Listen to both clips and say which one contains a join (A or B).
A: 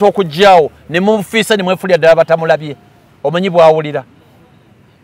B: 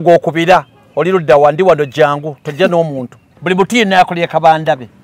B